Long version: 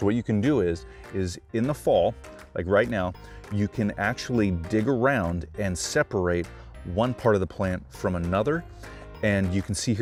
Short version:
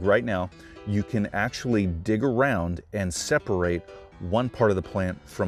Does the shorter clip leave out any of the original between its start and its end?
no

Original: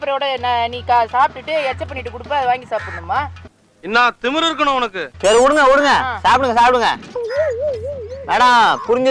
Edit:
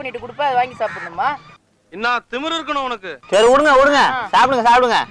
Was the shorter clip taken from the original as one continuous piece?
yes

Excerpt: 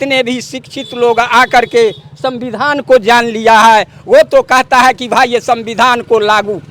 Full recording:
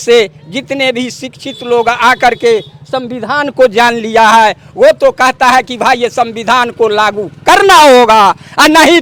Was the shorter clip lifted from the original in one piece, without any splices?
yes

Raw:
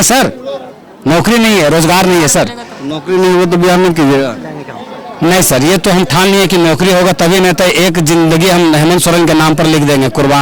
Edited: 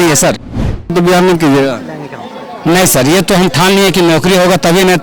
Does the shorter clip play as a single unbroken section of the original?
no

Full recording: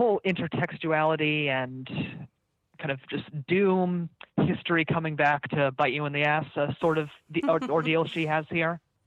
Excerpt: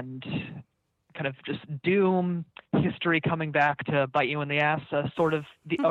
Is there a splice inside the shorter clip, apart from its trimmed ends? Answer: no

